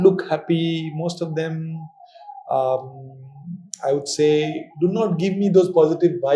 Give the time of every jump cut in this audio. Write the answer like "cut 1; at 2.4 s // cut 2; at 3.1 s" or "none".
none

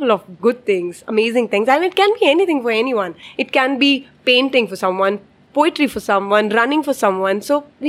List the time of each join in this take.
cut 1; at 3.3 s

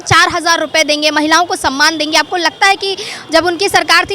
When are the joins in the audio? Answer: none

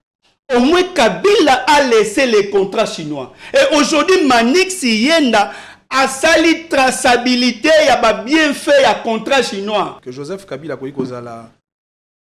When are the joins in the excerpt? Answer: cut 1; at 9.9 s

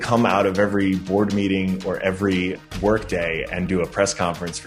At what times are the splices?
cut 1; at 2.6 s

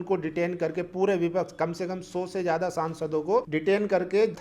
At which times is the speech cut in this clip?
cut 1; at 3.5 s

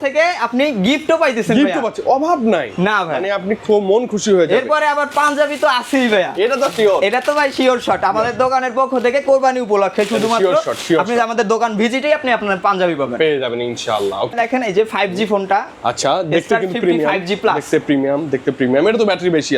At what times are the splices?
none

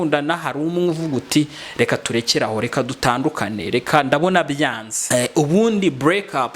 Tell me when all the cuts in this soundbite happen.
cut 1; at 4.9 s

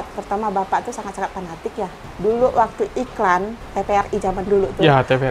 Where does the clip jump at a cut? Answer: cut 1; at 2.0 s // cut 2; at 3.6 s

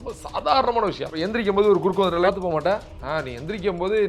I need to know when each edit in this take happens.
cut 1; at 1.1 s // cut 2; at 2.2 s // cut 3; at 2.9 s

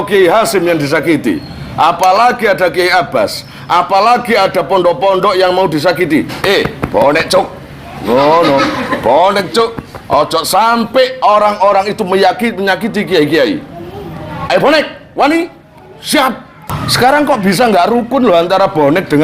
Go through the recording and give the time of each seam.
cut 1; at 16.8 s

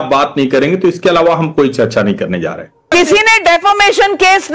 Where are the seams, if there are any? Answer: cut 1; at 2.9 s

